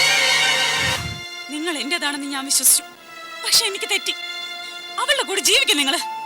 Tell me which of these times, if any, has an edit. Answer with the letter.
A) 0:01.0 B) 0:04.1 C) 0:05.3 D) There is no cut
A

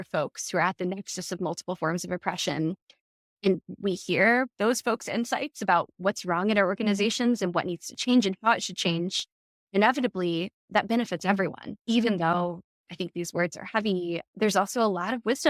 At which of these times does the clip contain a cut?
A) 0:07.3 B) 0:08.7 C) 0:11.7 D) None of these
C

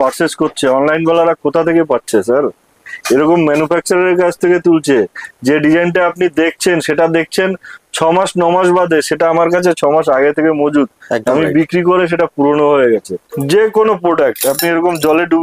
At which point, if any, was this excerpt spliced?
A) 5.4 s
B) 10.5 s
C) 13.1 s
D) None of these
C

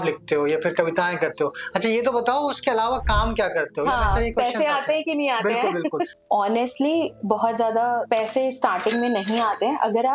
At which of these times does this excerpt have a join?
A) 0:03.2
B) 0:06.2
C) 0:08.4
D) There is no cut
B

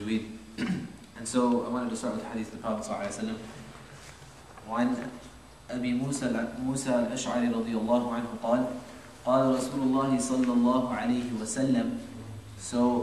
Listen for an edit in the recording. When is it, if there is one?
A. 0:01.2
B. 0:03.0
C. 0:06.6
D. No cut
B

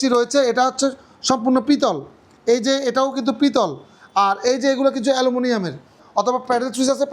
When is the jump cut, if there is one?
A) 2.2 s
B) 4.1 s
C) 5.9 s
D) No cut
C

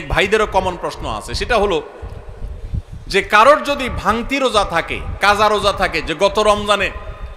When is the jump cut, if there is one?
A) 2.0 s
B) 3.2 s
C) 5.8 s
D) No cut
D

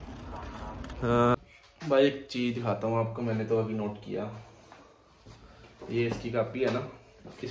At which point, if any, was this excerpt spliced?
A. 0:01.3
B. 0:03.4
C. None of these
A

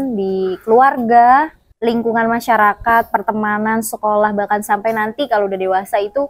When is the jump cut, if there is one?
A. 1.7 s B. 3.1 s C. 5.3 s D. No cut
D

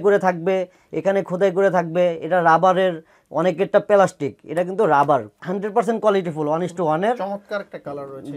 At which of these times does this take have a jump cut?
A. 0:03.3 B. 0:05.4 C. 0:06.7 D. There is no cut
B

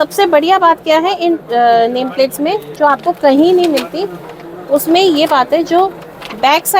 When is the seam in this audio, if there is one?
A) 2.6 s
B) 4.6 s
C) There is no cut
C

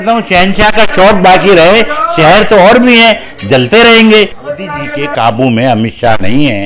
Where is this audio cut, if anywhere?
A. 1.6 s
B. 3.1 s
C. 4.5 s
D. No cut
C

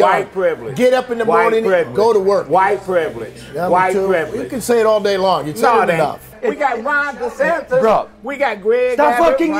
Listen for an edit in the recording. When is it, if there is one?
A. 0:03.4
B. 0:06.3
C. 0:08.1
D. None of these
B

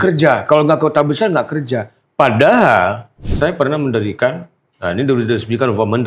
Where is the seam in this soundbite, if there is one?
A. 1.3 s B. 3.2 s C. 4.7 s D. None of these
B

